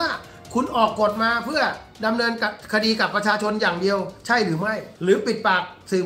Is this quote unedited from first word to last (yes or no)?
no